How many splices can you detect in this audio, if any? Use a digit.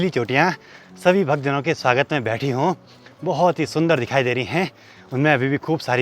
0